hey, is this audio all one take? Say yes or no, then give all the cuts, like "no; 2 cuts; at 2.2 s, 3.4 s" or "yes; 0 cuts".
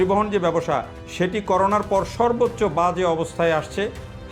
yes; 0 cuts